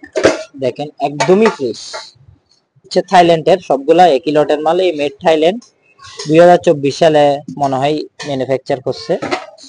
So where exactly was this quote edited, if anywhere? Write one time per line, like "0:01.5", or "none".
0:02.9